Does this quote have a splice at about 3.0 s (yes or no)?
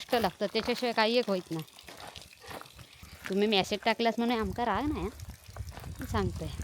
yes